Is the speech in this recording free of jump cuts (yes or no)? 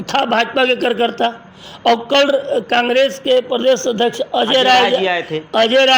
yes